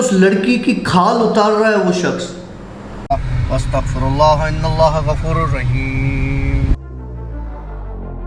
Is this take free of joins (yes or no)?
no